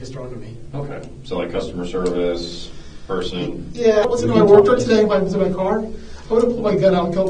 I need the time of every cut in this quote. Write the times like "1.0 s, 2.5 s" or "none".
4.0 s